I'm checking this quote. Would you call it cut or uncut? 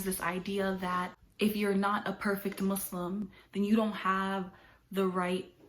cut